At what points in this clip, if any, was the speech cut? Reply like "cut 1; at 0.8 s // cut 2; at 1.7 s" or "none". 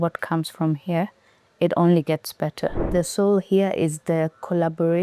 cut 1; at 2.9 s